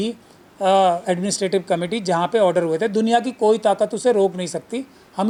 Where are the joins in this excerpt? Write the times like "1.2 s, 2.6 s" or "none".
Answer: none